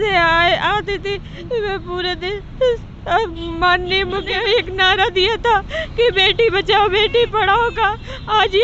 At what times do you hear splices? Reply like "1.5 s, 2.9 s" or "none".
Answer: 4.3 s

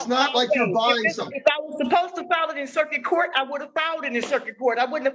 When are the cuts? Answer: none

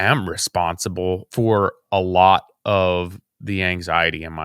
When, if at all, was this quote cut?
1.3 s

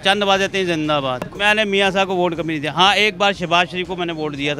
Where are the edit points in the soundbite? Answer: 1.3 s

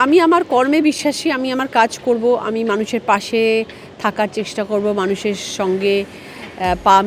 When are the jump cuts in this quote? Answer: none

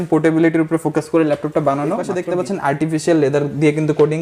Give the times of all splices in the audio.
2.1 s

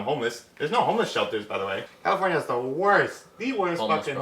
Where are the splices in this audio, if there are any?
1.9 s

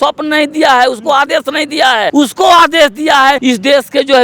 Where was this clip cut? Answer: 2.1 s, 3.4 s

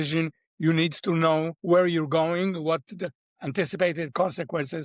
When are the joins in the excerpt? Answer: 1.6 s, 3.3 s

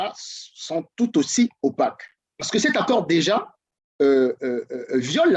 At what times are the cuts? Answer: none

